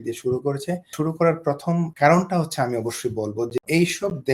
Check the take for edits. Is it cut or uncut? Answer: cut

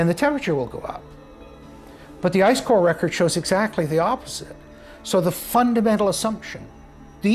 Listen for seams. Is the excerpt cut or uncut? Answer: uncut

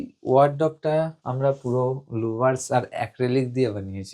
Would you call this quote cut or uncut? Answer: cut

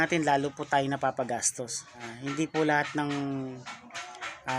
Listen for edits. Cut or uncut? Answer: cut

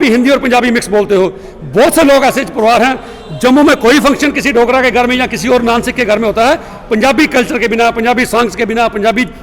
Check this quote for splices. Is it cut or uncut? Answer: uncut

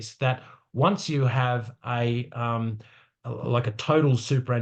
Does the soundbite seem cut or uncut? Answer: uncut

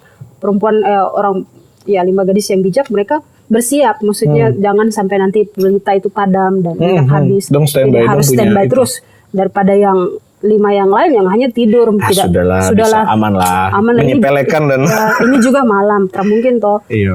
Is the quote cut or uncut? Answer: uncut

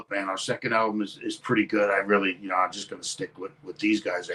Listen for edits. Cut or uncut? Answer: uncut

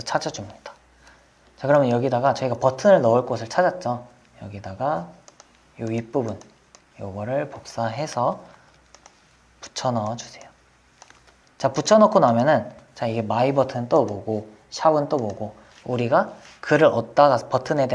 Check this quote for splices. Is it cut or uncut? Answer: uncut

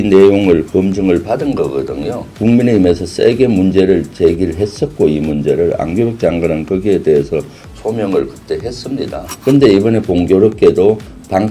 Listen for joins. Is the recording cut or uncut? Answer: cut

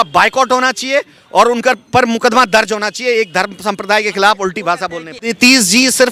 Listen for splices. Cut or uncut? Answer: cut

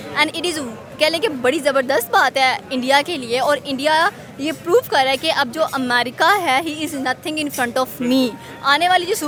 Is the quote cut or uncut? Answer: uncut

